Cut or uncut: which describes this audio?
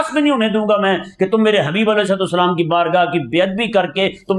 uncut